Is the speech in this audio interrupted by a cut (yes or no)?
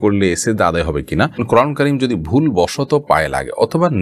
yes